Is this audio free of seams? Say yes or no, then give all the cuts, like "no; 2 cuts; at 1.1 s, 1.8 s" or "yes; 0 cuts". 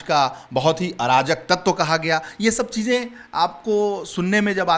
yes; 0 cuts